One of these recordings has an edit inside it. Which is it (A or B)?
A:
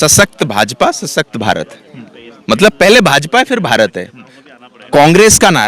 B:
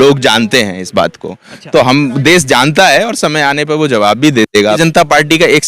B